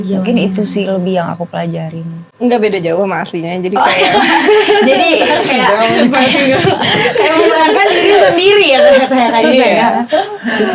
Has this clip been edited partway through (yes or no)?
yes